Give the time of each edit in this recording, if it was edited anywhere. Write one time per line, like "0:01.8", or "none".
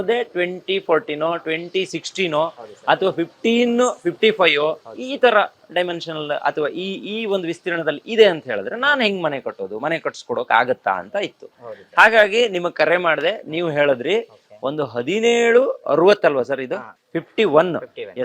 none